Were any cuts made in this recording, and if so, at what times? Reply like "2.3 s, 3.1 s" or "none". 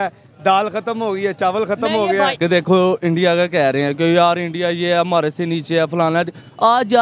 2.3 s

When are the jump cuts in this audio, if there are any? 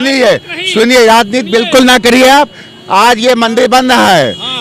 none

